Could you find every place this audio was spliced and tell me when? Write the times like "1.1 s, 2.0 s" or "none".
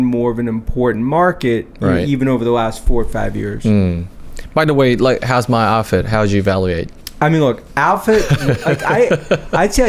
none